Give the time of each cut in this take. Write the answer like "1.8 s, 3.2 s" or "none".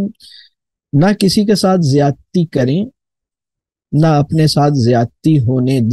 none